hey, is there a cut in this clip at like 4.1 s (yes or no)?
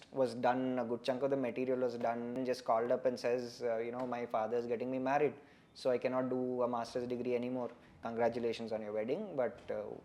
no